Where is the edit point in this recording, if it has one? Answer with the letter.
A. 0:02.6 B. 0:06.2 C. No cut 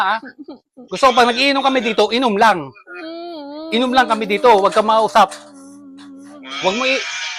C